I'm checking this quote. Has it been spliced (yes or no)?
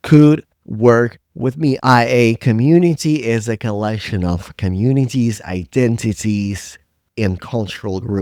yes